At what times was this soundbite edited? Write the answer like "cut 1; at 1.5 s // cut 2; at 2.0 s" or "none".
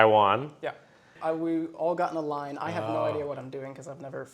cut 1; at 1.1 s